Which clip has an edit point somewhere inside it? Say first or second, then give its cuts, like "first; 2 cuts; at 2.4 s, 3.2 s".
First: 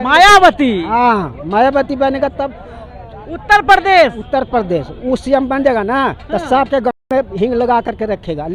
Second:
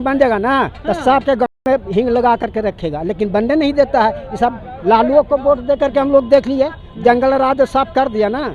second; 1 cut; at 4.7 s